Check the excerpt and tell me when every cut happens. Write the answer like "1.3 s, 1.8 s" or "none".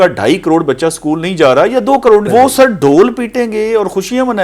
2.3 s